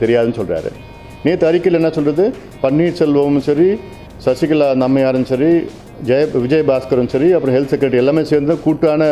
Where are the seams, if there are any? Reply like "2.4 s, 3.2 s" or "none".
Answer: none